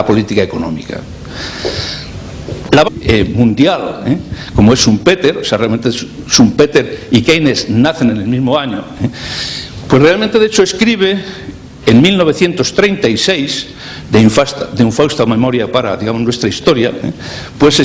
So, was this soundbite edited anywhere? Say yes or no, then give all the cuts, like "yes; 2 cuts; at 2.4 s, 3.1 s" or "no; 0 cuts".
no; 0 cuts